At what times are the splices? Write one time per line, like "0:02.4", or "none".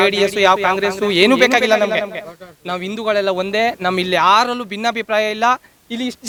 none